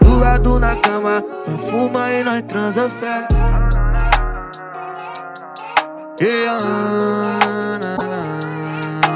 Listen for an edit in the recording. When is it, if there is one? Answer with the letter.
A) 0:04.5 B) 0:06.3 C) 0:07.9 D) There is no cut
C